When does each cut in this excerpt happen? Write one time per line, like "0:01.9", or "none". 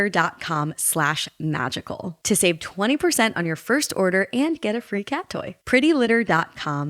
none